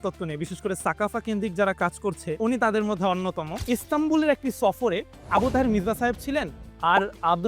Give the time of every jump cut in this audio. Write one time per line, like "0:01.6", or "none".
0:02.4
0:03.6